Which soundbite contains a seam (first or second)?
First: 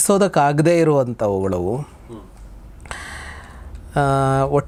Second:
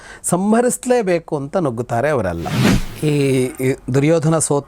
second